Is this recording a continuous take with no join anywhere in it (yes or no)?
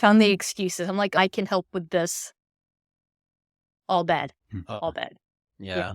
no